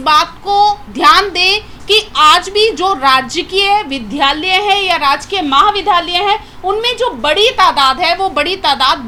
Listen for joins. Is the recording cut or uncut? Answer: uncut